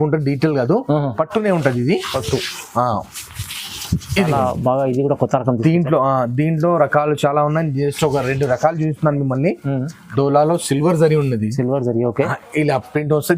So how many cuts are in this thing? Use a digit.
1